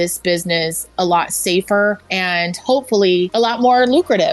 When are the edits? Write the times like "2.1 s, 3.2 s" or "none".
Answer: 2.1 s, 3.3 s